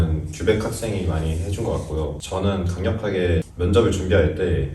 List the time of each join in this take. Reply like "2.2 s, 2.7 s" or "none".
2.2 s, 3.5 s